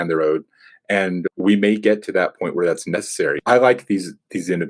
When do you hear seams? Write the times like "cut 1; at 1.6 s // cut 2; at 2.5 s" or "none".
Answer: cut 1; at 3.4 s